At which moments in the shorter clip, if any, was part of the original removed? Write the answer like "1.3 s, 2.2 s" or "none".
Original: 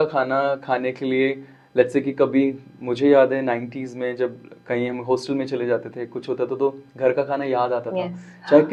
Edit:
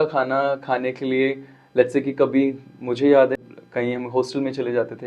3.4 s